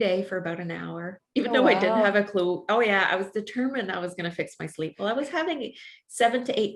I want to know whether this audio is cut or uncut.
uncut